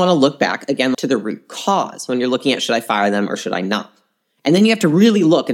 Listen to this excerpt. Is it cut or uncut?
cut